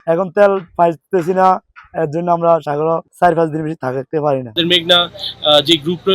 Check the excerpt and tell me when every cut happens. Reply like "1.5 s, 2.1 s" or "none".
4.6 s